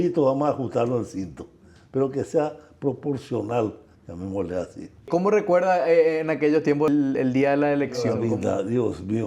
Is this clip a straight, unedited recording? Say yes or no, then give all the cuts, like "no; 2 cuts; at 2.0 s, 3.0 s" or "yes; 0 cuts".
no; 3 cuts; at 5.1 s, 6.9 s, 8.2 s